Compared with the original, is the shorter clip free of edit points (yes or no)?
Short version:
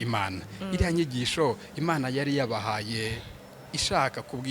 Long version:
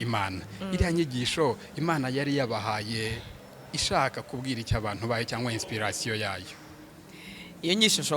yes